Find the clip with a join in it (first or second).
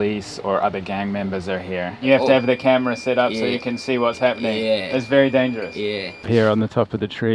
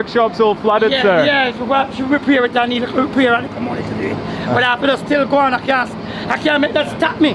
first